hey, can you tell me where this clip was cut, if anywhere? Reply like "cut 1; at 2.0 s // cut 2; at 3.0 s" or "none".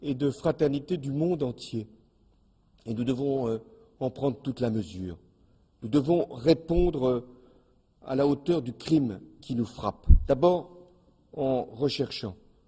cut 1; at 4.1 s